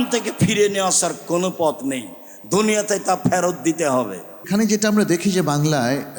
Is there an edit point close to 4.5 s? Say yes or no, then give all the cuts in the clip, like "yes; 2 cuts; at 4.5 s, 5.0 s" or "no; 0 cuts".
yes; 1 cut; at 4.5 s